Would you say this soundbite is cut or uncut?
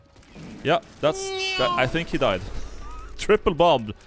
uncut